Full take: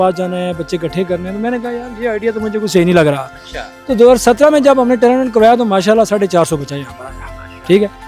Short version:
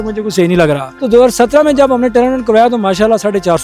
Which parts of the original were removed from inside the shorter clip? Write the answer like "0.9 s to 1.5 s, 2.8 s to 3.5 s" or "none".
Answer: 3.3 s to 3.8 s

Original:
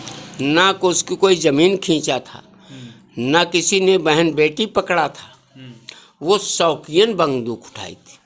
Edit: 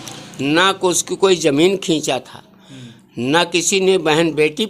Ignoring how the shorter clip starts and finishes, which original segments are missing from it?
none

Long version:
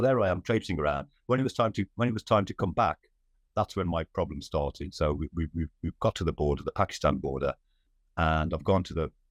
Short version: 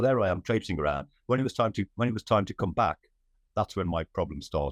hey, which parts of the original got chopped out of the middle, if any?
none

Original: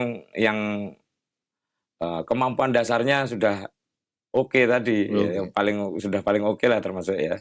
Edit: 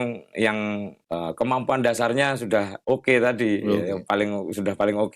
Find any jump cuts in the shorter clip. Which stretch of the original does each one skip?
1.0 s to 1.9 s, 3.7 s to 4.2 s

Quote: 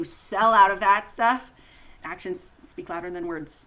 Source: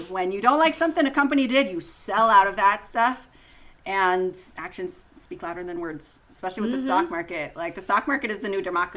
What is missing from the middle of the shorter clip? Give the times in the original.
3.7 s to 4.5 s

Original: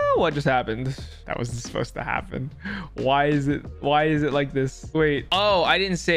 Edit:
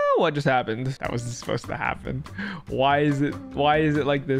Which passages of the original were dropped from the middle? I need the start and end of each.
0.9 s to 1.2 s

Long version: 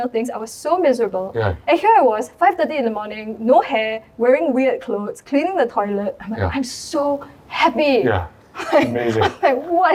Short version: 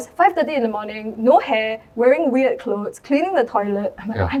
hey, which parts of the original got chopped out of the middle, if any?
none

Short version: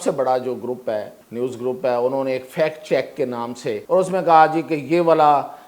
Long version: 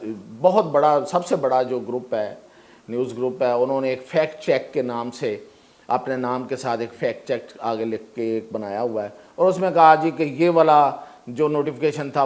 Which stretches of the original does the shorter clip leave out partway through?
2.4 s to 2.8 s, 5.4 s to 9.3 s

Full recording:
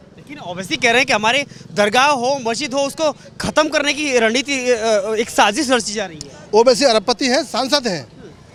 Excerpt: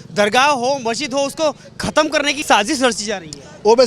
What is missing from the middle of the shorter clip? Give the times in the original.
4.0 s to 5.3 s

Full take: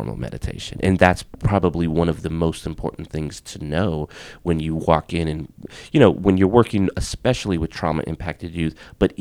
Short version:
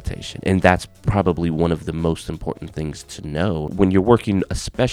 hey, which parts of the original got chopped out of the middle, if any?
4.1 s to 6.2 s

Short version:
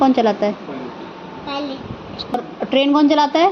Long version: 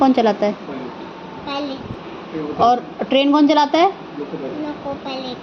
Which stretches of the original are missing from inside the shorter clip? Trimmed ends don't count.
2.3 s to 2.7 s

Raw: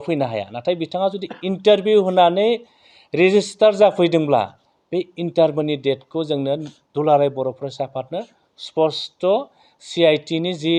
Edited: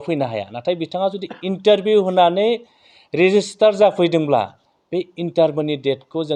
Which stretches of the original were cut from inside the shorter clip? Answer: none

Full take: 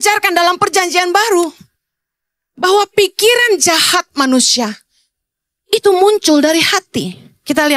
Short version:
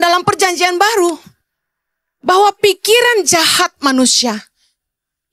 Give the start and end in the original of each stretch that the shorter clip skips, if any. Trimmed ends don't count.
none

